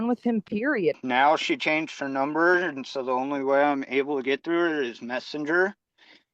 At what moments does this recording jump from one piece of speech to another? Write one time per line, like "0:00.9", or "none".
0:00.9